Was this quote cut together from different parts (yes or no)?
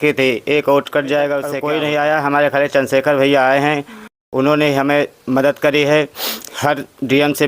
yes